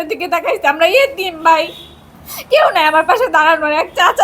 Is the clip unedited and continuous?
yes; 0 cuts

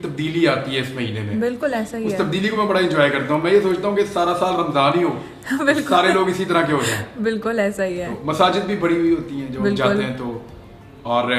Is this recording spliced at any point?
no; 0 cuts

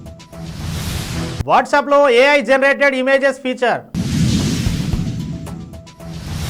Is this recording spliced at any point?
no; 0 cuts

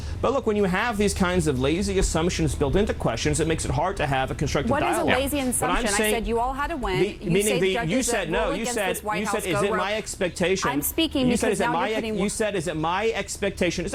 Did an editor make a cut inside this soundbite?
no; 0 cuts

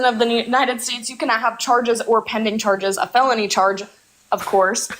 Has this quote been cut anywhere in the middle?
no; 0 cuts

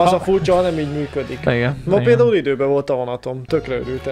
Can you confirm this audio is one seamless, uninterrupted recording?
yes; 0 cuts

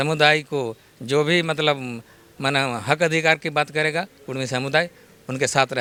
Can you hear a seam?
no; 0 cuts

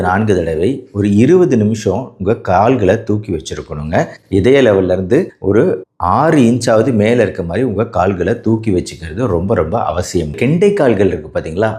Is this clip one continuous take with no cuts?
no; 1 cut; at 10.4 s

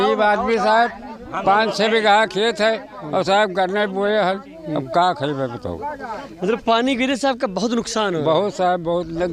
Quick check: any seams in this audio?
no; 0 cuts

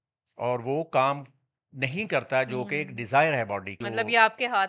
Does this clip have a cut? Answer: yes; 1 cut; at 3.8 s

